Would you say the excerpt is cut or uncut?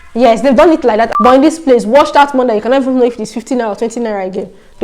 cut